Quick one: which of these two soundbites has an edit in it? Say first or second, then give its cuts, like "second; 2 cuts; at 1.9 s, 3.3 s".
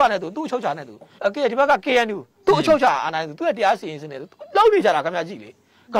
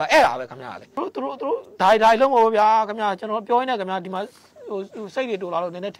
second; 1 cut; at 1.0 s